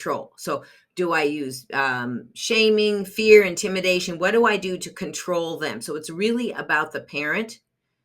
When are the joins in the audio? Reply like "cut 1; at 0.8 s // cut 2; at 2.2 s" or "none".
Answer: none

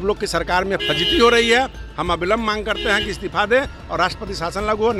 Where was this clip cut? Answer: none

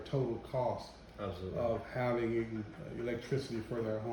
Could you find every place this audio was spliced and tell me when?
none

